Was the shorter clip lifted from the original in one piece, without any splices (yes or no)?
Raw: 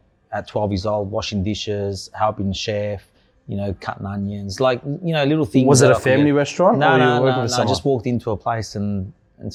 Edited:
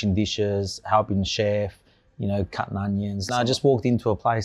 no